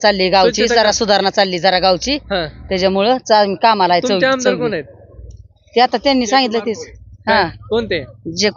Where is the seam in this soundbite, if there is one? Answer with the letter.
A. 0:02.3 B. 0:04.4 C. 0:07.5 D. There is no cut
D